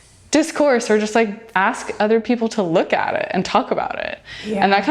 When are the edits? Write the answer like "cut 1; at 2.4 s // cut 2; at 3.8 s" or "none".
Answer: cut 1; at 1.4 s